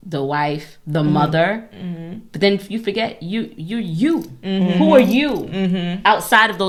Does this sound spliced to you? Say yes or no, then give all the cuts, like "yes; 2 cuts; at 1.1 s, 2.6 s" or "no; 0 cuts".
no; 0 cuts